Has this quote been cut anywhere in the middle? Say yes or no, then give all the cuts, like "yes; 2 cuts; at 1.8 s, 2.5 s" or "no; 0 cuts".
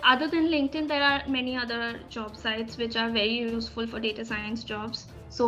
no; 0 cuts